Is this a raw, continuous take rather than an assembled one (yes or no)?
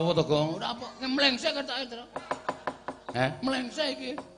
yes